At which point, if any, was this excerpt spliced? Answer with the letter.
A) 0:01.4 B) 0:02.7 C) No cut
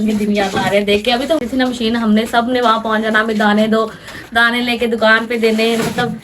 A